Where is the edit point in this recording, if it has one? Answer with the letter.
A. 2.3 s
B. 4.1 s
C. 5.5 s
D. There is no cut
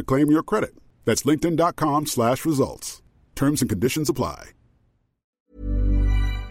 C